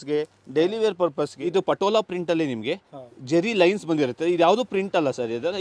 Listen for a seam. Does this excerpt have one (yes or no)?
yes